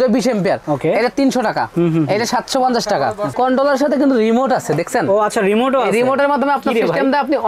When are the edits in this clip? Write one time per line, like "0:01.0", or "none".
0:01.7
0:03.3